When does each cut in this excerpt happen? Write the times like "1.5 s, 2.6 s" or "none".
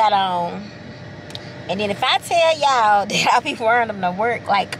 none

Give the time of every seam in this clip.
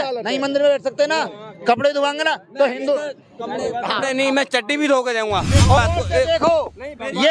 5.8 s

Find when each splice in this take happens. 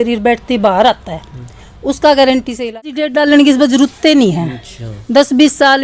2.9 s

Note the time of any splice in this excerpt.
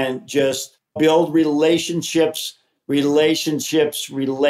0.9 s

